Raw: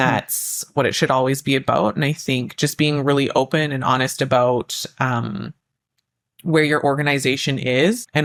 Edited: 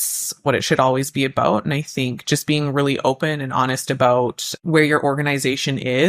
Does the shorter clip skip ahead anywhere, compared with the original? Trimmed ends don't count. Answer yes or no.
yes